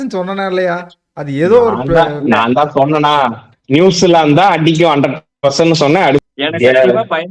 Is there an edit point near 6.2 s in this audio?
yes; 1 cut; at 6.2 s

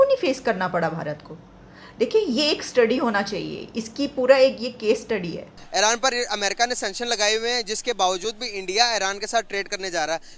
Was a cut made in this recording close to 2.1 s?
no; 1 cut; at 5.6 s

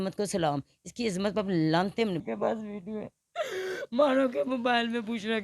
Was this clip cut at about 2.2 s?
yes; 1 cut; at 2.2 s

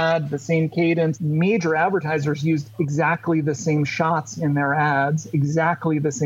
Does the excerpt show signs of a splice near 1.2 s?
yes; 1 cut; at 1.2 s

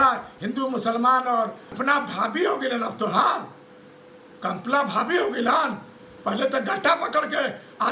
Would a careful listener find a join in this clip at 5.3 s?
no; 1 cut; at 1.7 s

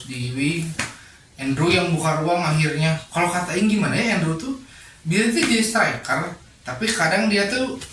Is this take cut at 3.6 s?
no; 0 cuts

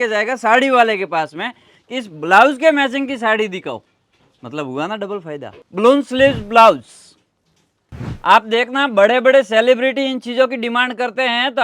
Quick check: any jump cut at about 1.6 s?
no; 1 cut; at 5.6 s

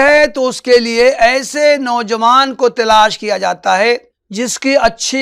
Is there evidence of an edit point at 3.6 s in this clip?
no; 0 cuts

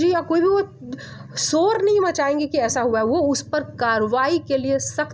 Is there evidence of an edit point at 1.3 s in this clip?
no; 0 cuts

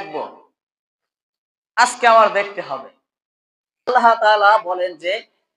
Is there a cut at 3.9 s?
yes; 1 cut; at 3.9 s

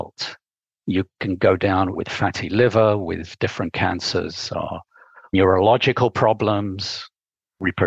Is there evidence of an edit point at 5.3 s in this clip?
yes; 3 cuts; at 2.0 s, 3.3 s, 5.3 s

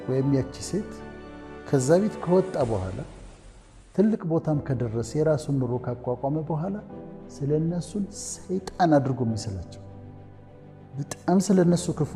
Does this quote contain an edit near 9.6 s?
yes; 2 cuts; at 9.6 s, 10.9 s

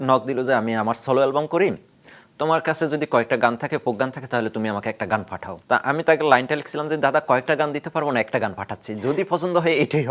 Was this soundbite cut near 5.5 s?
yes; 1 cut; at 5.5 s

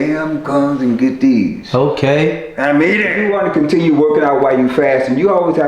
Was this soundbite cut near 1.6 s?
no; 1 cut; at 3.1 s

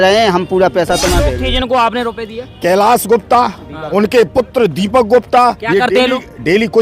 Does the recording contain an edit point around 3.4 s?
no; 1 cut; at 1.3 s

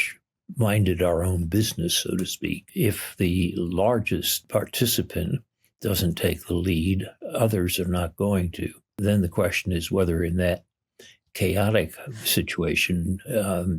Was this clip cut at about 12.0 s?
no; 3 cuts; at 2.7 s, 4.4 s, 8.9 s

